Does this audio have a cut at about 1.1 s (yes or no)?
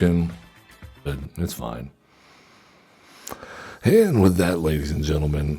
yes